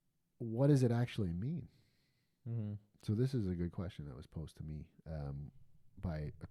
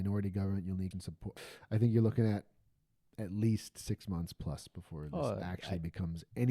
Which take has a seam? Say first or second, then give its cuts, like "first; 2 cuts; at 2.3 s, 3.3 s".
second; 1 cut; at 0.9 s